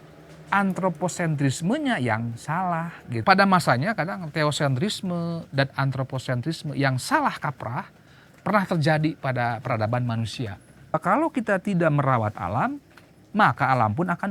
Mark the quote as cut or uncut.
cut